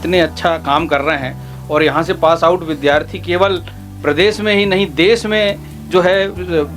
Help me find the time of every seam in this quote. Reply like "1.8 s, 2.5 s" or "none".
none

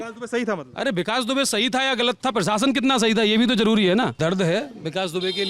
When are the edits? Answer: 4.1 s

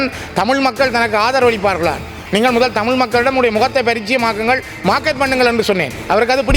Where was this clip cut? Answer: 2.1 s

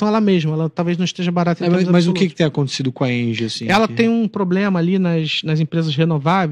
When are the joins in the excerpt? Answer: none

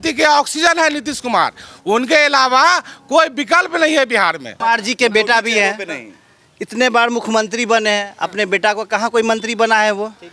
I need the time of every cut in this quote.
4.5 s

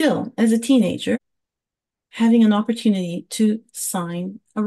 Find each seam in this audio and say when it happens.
1.2 s

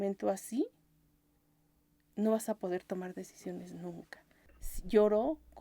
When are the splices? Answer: 4.4 s

